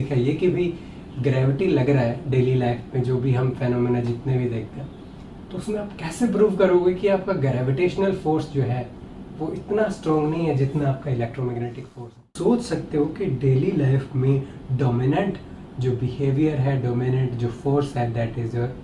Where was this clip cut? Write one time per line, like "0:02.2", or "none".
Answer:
0:12.3